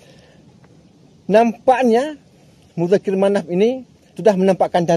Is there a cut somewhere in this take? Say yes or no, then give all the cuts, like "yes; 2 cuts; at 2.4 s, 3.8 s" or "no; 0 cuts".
no; 0 cuts